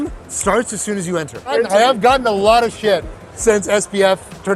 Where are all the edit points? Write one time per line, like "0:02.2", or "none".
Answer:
0:01.5